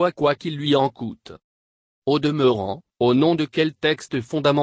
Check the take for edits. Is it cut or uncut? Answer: cut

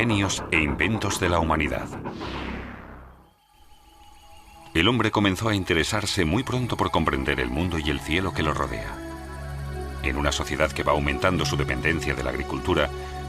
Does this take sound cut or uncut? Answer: uncut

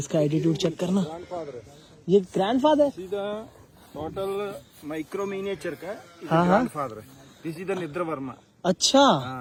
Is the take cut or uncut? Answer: uncut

